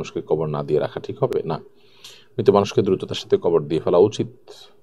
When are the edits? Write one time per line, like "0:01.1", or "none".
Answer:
none